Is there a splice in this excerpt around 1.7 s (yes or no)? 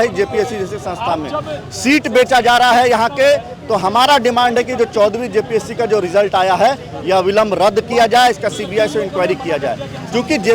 no